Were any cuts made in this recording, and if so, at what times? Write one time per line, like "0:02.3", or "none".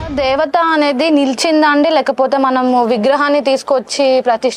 none